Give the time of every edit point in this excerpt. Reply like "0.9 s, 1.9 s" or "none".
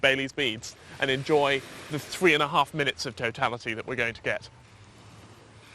4.5 s